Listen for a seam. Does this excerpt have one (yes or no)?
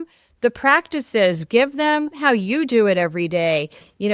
yes